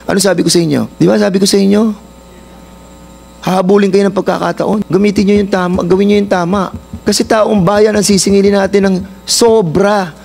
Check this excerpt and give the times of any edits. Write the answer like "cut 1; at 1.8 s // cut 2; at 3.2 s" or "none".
cut 1; at 0.9 s // cut 2; at 4.8 s // cut 3; at 6.8 s